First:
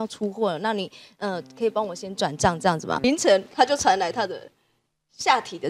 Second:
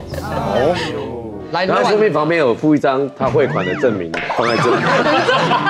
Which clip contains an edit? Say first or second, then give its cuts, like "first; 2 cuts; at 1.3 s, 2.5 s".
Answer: first; 1 cut; at 3.0 s